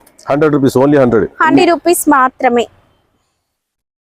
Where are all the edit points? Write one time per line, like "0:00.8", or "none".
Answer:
0:01.5